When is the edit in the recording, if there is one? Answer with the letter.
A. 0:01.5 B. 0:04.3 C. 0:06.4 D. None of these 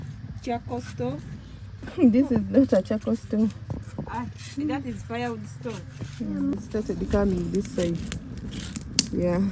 C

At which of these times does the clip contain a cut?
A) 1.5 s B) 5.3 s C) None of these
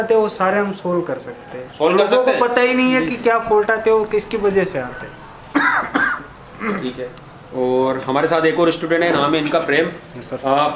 C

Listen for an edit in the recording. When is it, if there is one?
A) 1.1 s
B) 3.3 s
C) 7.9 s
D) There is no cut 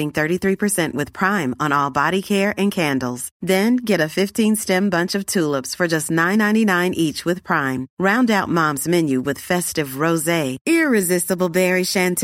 D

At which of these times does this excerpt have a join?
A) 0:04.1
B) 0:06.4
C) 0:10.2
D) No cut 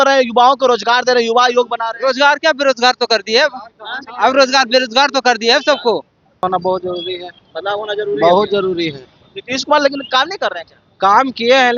B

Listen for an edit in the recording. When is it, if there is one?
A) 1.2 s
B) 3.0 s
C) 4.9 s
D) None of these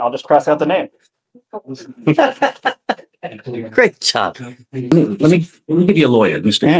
C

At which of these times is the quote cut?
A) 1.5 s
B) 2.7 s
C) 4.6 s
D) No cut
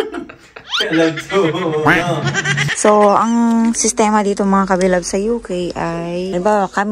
B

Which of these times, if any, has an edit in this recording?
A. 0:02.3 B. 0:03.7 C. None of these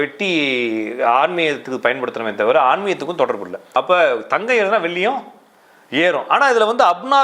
B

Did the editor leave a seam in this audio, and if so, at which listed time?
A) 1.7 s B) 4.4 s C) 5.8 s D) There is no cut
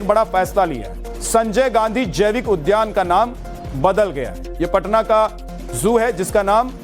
B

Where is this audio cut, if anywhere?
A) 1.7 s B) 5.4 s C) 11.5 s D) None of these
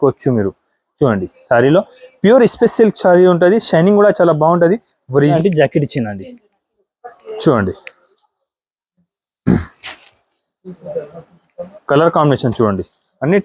B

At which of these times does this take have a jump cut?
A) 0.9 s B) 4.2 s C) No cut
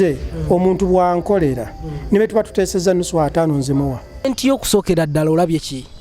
B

